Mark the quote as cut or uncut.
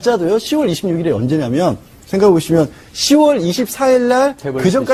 cut